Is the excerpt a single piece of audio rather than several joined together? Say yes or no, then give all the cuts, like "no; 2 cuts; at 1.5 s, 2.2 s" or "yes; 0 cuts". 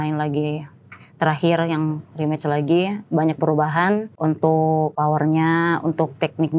no; 2 cuts; at 4.1 s, 4.9 s